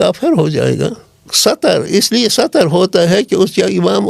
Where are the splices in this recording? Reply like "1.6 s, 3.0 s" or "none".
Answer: 1.2 s